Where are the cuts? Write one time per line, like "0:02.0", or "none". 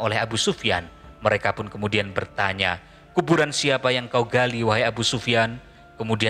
none